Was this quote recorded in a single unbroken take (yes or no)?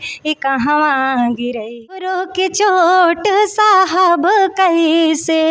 no